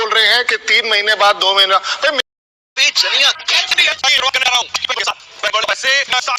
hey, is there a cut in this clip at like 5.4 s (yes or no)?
no